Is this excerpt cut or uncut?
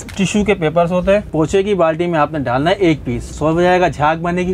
cut